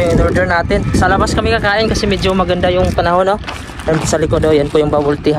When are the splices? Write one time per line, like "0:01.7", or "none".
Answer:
0:00.9